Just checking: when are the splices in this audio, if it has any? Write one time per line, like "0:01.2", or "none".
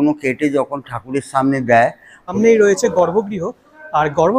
0:02.3